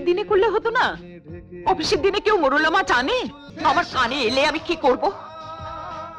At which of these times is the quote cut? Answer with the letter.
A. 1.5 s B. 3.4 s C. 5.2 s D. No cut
B